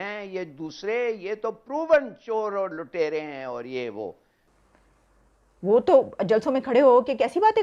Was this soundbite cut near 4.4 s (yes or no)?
yes